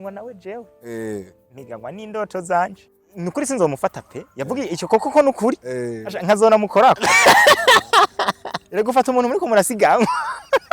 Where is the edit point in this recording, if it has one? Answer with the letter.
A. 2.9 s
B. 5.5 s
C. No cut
A